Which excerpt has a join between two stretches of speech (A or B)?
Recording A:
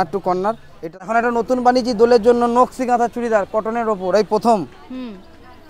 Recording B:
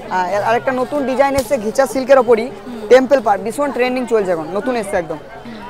A